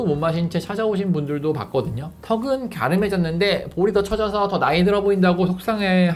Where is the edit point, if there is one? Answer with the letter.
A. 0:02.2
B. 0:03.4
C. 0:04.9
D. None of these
A